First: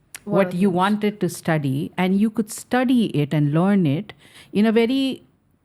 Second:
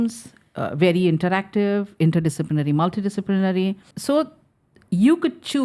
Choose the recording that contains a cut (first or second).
second